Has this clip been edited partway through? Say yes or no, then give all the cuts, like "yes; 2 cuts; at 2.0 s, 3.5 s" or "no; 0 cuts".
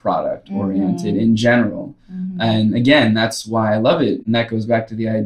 yes; 1 cut; at 4.3 s